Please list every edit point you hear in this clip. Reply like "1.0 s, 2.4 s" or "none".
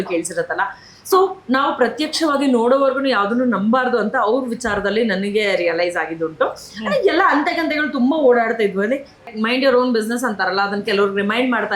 9.3 s